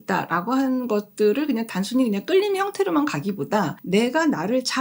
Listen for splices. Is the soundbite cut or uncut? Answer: cut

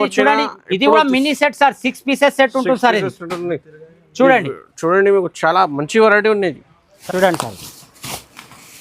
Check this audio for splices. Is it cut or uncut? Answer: cut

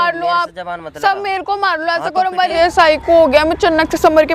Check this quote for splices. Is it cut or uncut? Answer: cut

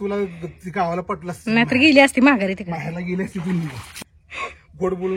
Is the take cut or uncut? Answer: cut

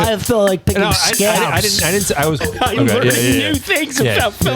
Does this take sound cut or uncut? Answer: cut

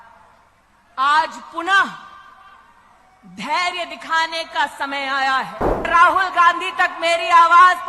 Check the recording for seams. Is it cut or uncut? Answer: cut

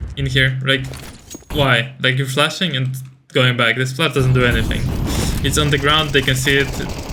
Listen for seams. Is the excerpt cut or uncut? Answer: uncut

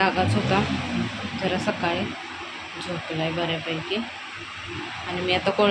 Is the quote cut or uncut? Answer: uncut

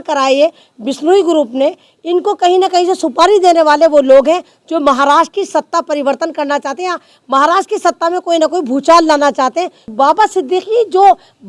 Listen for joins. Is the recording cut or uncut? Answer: cut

